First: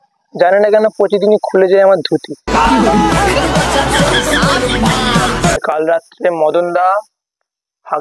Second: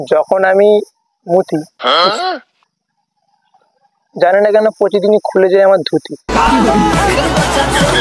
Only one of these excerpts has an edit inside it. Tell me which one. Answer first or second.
first